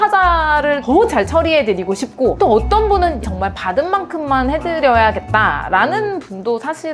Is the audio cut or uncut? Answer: uncut